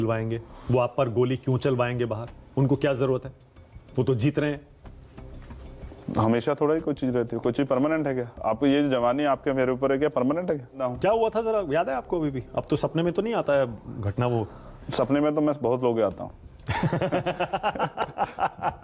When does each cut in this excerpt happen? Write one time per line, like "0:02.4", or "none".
0:10.8

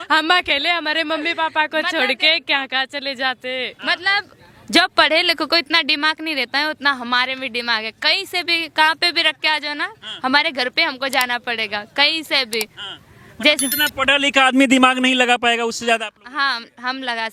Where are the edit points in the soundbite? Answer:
none

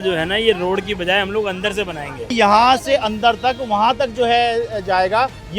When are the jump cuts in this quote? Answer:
0:02.3

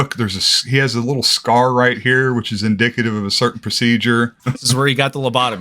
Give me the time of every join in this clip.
0:04.4

